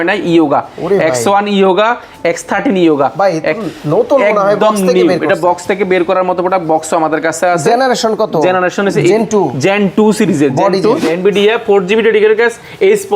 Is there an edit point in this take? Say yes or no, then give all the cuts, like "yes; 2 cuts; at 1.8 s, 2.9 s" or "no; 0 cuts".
yes; 1 cut; at 11.1 s